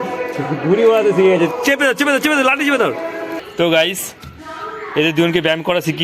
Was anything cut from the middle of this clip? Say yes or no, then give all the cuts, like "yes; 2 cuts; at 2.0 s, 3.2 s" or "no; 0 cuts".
yes; 1 cut; at 3.4 s